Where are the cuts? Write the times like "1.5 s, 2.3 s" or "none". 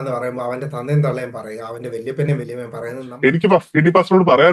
3.1 s